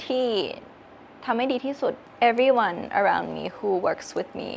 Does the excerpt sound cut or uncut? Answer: cut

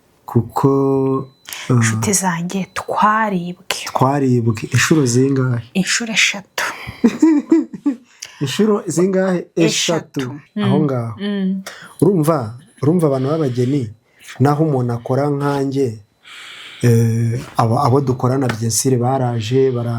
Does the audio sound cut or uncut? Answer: cut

